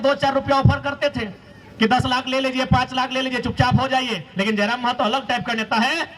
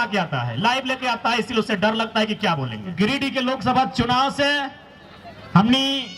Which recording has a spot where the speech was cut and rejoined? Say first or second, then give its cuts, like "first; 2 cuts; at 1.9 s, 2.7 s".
second; 1 cut; at 3.0 s